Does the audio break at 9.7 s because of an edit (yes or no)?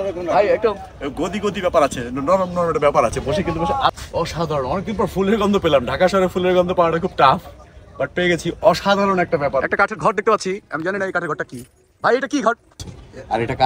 yes